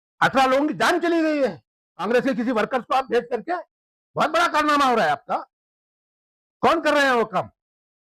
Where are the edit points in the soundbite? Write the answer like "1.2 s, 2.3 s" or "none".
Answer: 2.1 s